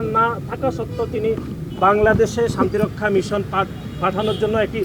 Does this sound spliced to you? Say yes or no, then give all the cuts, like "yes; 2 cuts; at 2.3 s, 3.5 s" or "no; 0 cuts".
no; 0 cuts